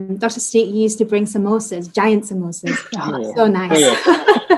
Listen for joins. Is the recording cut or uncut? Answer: uncut